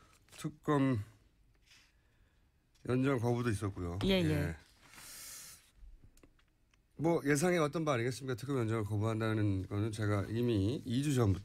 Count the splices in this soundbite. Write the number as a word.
one